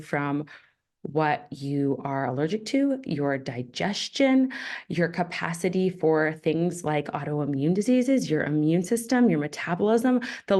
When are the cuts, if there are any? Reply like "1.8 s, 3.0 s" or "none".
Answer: none